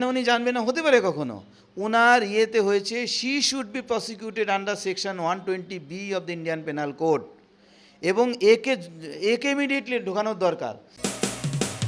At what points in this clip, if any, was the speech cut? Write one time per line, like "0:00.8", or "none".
0:10.9